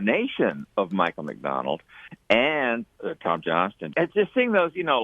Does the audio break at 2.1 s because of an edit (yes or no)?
no